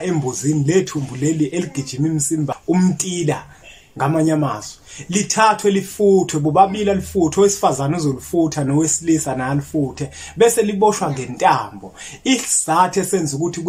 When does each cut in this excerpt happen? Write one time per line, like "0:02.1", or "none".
0:02.6